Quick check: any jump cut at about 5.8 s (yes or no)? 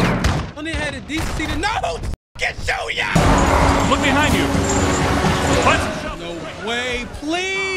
no